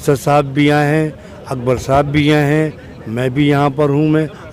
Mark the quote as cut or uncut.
uncut